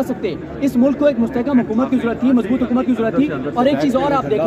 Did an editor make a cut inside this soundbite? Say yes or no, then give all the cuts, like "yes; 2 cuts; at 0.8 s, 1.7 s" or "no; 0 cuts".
no; 0 cuts